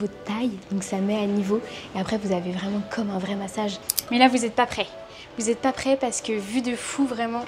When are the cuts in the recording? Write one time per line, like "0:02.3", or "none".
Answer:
0:03.9